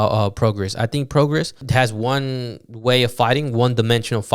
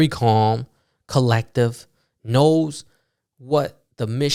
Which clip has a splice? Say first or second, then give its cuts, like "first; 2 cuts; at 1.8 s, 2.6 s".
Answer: first; 1 cut; at 1.6 s